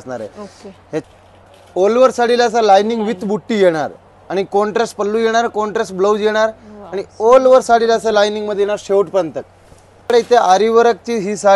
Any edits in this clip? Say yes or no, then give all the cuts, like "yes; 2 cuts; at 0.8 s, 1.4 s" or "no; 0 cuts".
yes; 2 cuts; at 1.0 s, 10.1 s